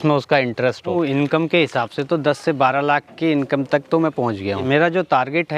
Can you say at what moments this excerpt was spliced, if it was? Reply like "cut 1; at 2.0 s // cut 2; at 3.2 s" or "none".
cut 1; at 0.9 s // cut 2; at 4.6 s